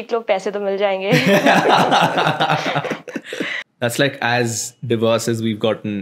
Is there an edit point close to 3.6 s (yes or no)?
yes